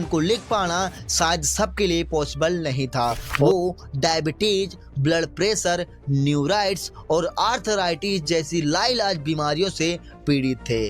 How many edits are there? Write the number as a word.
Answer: one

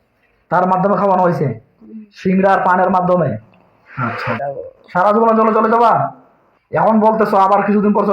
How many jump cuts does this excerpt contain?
one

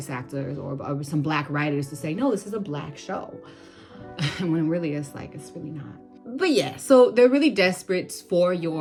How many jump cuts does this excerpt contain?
zero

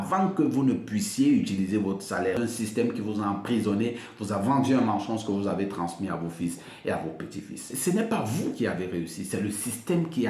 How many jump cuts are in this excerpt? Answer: two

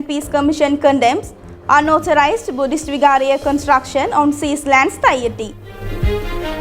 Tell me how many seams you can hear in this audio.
one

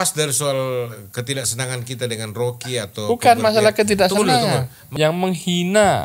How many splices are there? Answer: one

